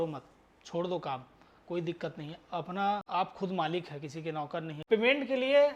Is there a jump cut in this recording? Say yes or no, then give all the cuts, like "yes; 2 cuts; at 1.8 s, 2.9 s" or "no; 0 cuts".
yes; 2 cuts; at 3.0 s, 4.7 s